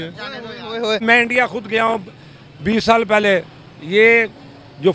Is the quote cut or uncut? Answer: cut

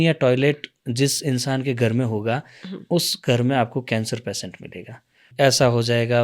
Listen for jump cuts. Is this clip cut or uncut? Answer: cut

